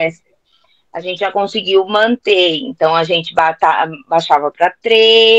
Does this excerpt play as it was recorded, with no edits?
yes; 0 cuts

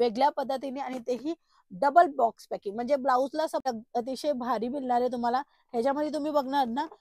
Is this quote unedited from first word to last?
no; 1 cut; at 3.7 s

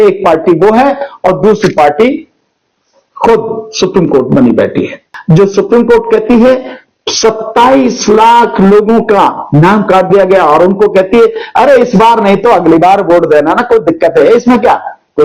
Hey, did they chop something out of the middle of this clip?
yes; 1 cut; at 5.1 s

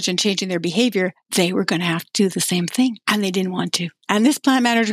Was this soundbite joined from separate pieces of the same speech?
yes; 3 cuts; at 1.2 s, 3.0 s, 4.0 s

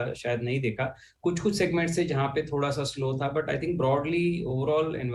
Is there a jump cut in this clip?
no; 0 cuts

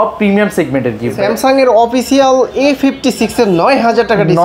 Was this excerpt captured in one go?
no; 1 cut; at 1.2 s

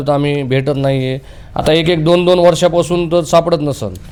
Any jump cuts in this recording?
no; 0 cuts

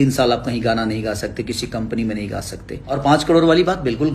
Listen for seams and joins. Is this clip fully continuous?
no; 1 cut; at 3.0 s

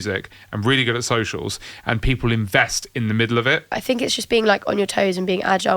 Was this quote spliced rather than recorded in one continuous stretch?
yes; 1 cut; at 3.8 s

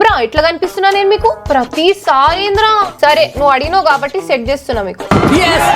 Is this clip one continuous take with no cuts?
no; 1 cut; at 1.4 s

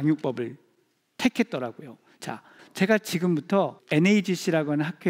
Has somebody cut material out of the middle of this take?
yes; 2 cuts; at 2.5 s, 3.8 s

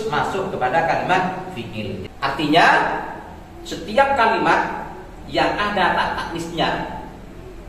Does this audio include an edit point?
yes; 1 cut; at 2.0 s

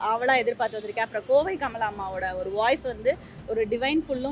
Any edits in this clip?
no; 0 cuts

